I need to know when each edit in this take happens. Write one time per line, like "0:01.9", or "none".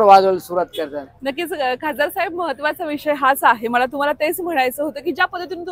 none